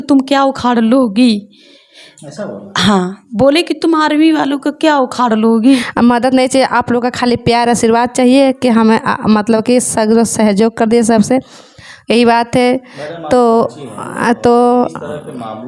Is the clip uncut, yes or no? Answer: no